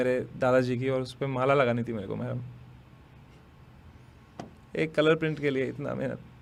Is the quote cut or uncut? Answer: uncut